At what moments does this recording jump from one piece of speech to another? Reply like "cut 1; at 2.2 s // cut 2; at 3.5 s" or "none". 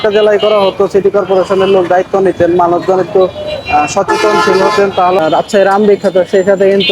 cut 1; at 5.2 s